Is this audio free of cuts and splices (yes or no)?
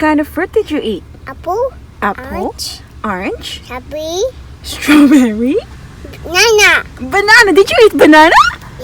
yes